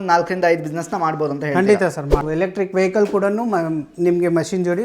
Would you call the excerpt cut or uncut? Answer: cut